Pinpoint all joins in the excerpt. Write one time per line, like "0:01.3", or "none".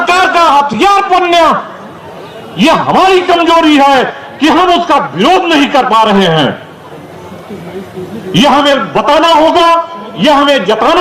none